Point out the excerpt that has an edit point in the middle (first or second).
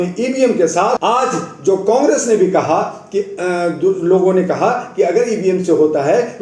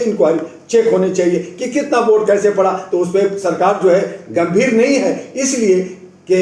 first